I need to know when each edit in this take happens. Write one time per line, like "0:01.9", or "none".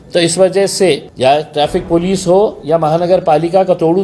0:01.1